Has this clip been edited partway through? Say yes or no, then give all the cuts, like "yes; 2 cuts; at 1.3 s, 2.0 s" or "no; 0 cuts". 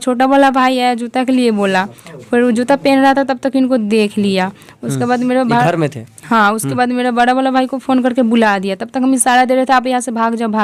no; 0 cuts